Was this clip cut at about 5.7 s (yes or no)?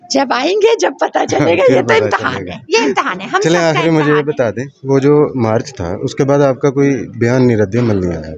no